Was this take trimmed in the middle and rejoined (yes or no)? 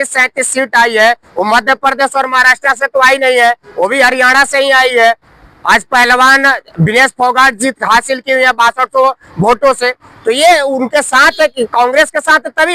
no